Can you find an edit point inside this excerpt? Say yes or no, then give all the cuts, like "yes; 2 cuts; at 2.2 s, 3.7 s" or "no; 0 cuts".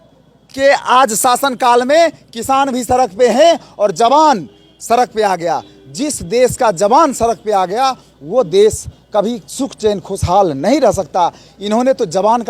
no; 0 cuts